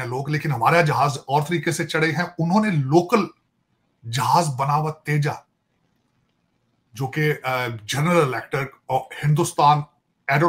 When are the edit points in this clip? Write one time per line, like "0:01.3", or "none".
none